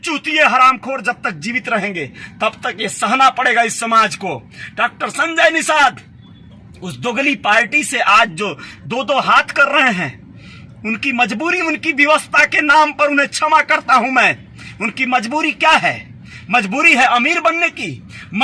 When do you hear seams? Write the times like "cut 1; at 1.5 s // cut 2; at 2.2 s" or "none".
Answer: none

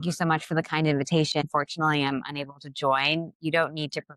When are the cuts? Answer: cut 1; at 1.4 s

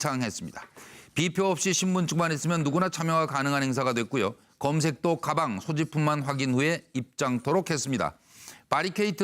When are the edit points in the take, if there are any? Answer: cut 1; at 5.3 s

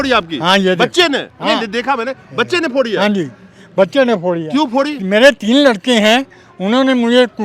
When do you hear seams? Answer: none

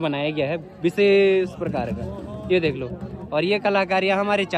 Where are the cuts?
none

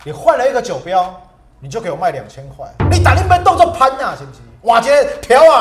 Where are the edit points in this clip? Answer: none

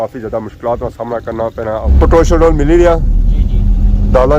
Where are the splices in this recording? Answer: cut 1; at 1.9 s

